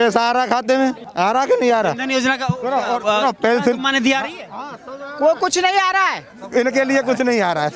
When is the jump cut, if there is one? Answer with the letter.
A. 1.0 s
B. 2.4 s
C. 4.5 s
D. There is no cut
A